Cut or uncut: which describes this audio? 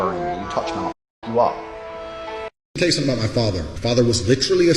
cut